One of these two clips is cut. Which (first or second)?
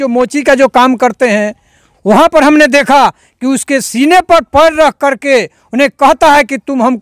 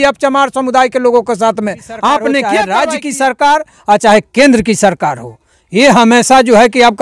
second